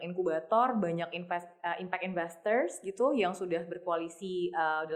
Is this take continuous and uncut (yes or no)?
yes